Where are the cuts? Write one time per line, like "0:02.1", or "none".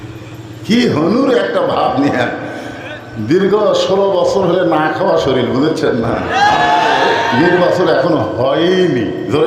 0:07.2